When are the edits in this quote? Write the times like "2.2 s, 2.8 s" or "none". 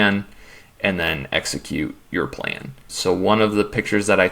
2.8 s